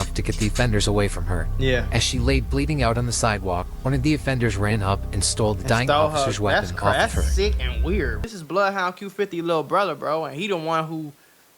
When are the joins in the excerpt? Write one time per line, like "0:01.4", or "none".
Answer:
0:08.3